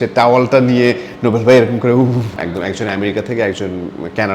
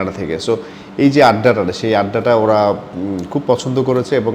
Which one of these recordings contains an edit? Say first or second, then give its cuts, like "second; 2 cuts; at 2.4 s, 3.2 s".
first; 1 cut; at 2.4 s